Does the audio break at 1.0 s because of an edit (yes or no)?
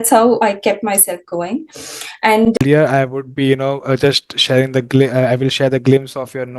no